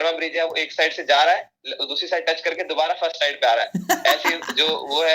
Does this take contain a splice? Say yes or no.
no